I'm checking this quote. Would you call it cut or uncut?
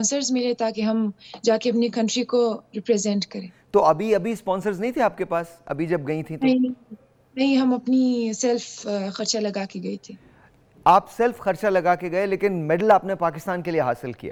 uncut